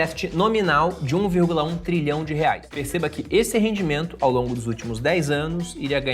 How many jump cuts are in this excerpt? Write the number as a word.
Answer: one